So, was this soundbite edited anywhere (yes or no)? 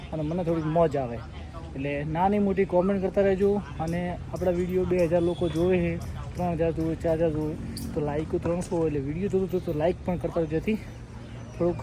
no